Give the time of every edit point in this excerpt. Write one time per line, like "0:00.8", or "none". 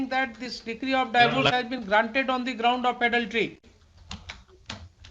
none